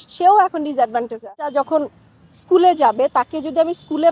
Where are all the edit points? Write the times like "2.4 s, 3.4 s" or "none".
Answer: 1.5 s